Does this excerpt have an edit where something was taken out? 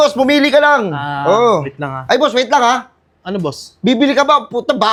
no; 0 cuts

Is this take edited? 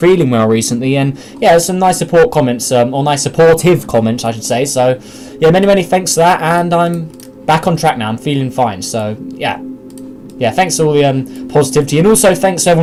no; 0 cuts

